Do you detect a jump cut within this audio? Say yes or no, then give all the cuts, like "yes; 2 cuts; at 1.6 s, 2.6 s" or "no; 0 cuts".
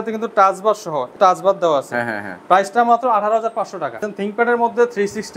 yes; 2 cuts; at 1.1 s, 4.1 s